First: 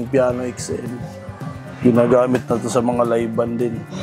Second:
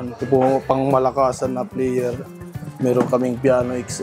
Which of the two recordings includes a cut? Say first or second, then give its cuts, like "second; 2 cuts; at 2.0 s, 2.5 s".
first; 1 cut; at 1.8 s